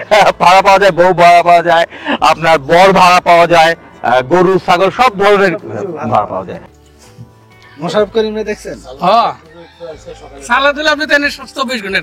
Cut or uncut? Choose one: cut